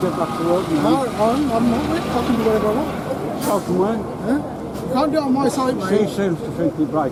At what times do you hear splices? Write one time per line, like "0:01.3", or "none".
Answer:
none